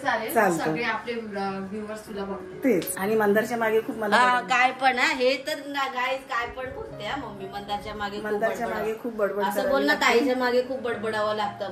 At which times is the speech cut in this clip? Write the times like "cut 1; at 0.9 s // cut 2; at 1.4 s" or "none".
cut 1; at 2.9 s